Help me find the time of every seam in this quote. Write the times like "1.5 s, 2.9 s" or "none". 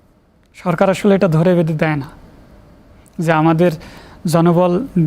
none